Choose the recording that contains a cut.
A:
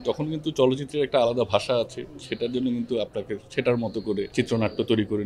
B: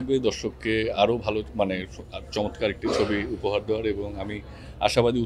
A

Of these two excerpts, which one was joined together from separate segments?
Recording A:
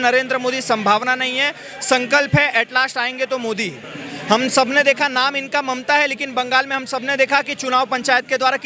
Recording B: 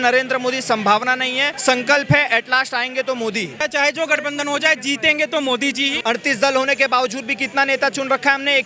B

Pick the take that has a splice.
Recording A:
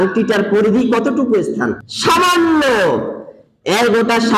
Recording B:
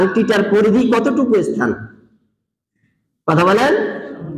A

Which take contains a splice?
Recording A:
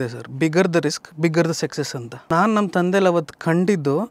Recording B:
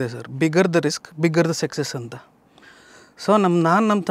A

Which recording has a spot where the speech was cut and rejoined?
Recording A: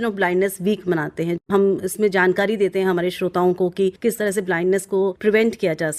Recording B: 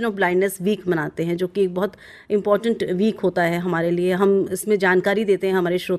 A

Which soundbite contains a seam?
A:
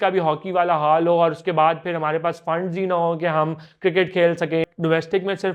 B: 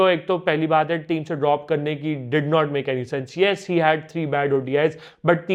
A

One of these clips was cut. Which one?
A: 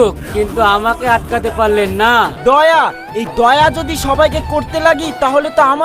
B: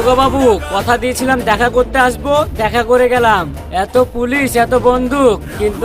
A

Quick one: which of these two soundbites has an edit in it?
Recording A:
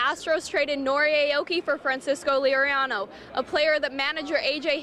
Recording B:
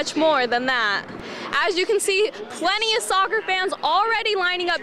B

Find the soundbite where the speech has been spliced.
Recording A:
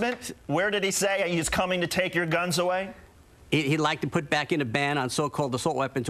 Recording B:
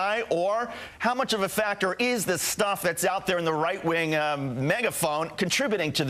A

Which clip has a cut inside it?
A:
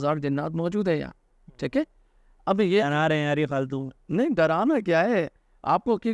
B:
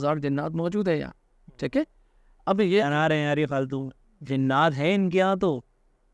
B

